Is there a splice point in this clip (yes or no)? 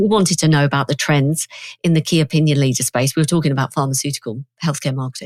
no